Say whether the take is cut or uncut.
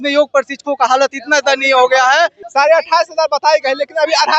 cut